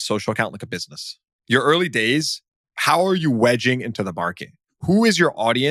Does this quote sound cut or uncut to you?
cut